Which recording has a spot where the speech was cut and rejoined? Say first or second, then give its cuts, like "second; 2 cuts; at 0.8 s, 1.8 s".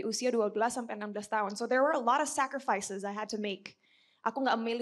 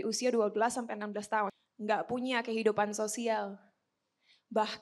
second; 1 cut; at 1.5 s